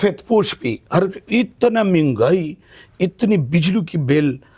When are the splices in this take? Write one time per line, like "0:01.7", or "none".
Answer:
none